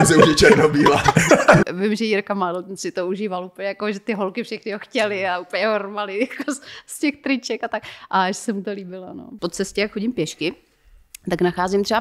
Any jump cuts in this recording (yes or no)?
yes